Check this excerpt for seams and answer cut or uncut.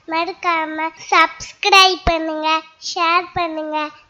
cut